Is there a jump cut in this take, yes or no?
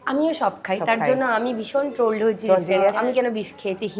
yes